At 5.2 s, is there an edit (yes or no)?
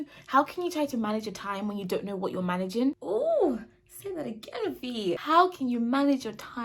yes